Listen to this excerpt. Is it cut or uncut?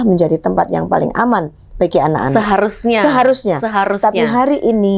uncut